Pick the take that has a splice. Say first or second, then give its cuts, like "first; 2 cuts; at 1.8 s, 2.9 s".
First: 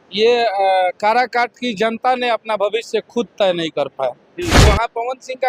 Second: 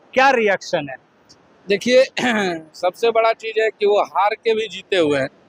first; 1 cut; at 4.6 s